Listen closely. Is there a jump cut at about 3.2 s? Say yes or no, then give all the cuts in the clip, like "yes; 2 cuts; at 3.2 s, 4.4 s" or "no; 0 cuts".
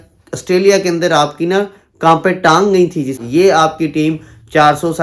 yes; 1 cut; at 3.2 s